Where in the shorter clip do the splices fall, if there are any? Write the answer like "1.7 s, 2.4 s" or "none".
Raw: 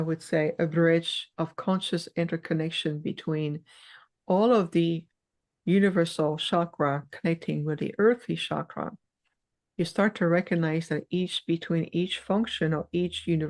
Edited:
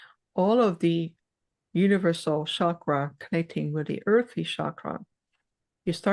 none

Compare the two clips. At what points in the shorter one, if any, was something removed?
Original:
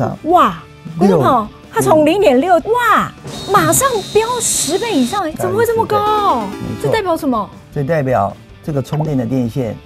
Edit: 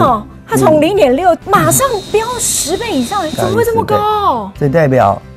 1.4 s, 4.5 s

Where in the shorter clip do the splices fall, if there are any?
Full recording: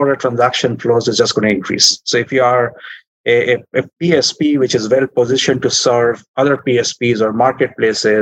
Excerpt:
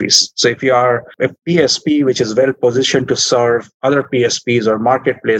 1.1 s

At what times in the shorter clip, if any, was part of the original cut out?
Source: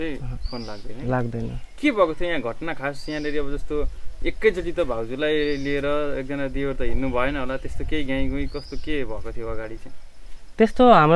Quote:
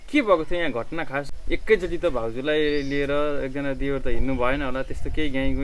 1.3 s

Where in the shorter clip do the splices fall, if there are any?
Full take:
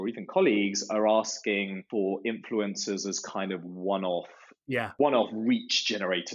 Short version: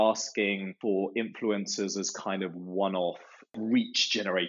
3.5 s

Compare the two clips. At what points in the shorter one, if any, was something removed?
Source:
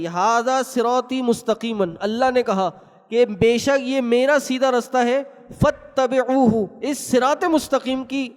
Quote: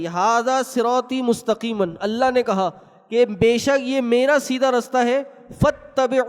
none

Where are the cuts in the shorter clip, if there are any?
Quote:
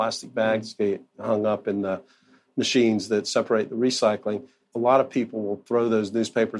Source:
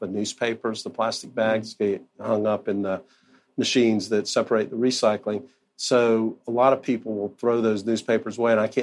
4.7 s

